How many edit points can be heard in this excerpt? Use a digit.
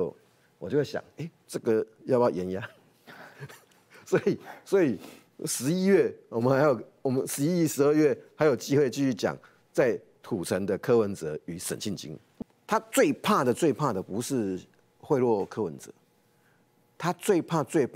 1